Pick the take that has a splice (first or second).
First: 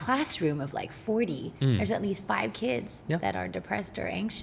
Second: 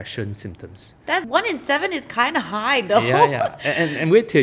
second